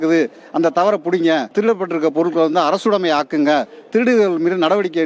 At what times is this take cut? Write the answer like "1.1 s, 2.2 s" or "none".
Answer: 1.5 s